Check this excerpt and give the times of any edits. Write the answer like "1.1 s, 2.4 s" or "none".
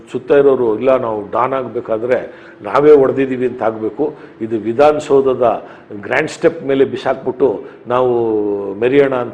none